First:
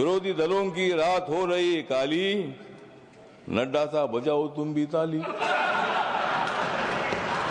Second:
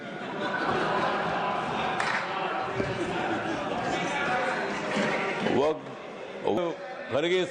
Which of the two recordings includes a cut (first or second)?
second